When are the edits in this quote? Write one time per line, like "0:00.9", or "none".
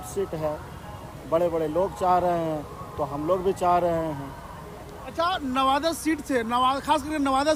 none